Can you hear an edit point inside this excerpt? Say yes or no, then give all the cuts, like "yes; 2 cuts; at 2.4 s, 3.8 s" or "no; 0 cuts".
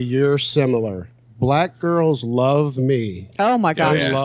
no; 0 cuts